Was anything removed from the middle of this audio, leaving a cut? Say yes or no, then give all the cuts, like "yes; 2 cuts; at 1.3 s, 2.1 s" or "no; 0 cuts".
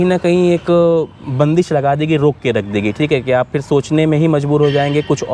no; 0 cuts